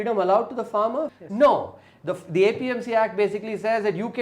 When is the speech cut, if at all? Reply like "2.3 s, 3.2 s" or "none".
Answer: 1.1 s